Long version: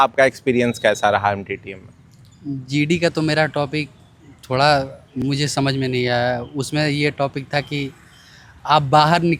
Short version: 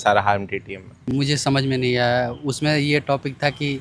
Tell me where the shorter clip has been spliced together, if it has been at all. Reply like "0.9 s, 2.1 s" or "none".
0.9 s